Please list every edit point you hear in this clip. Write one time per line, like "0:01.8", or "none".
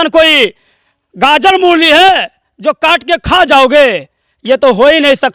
none